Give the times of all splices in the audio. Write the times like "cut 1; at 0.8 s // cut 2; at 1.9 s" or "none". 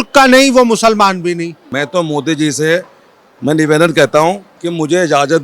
cut 1; at 1.6 s